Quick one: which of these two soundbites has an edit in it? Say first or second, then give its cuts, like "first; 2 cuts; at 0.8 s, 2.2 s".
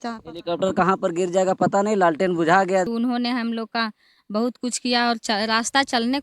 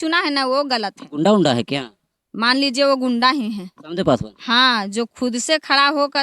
first; 1 cut; at 2.9 s